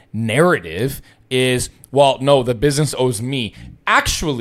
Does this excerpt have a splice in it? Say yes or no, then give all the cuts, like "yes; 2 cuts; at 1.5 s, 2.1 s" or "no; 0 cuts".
no; 0 cuts